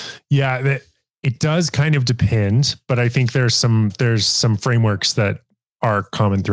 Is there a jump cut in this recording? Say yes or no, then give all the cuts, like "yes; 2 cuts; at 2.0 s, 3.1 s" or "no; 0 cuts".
no; 0 cuts